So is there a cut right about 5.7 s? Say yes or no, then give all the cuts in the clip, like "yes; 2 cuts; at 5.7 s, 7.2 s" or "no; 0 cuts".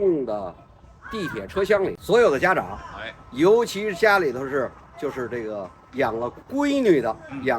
no; 1 cut; at 2.0 s